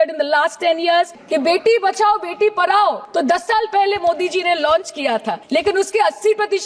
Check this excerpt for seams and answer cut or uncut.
cut